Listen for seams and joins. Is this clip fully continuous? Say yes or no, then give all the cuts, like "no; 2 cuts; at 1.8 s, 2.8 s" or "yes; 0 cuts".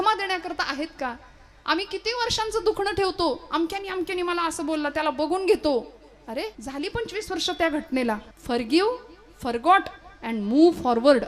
no; 2 cuts; at 6.6 s, 8.3 s